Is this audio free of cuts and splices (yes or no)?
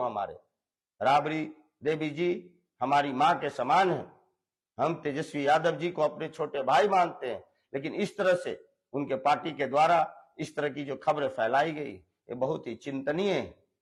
yes